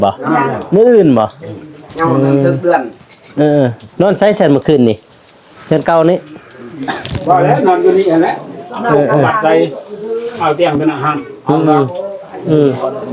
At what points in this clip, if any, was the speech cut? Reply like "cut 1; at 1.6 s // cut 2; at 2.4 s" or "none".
none